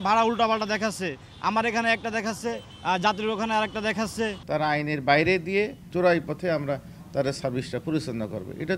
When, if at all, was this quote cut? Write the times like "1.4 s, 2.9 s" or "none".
4.4 s, 5.8 s